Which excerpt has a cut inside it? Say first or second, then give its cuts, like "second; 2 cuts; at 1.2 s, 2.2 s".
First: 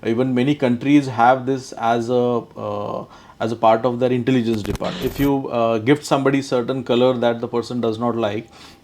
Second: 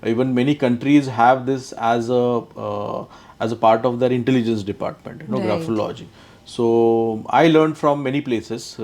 first; 1 cut; at 5.0 s